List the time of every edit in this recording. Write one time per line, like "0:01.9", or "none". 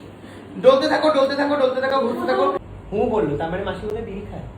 0:02.6